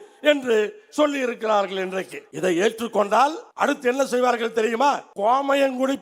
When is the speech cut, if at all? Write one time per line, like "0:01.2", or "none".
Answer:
0:02.2
0:03.4
0:05.1